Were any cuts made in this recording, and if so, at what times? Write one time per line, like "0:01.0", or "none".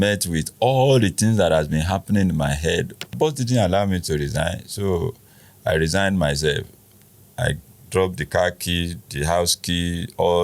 0:03.1